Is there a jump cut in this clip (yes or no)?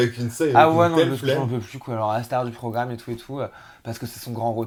no